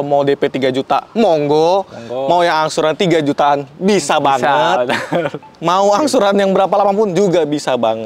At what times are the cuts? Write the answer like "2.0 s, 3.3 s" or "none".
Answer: none